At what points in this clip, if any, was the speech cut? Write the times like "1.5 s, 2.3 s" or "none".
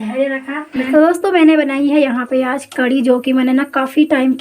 0.9 s